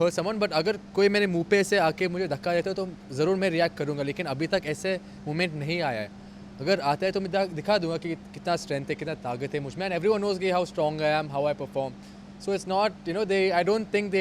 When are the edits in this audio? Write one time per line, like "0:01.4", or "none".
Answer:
none